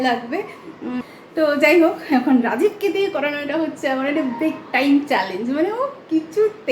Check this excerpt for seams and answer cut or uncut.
cut